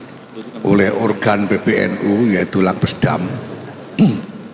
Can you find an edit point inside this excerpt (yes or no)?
no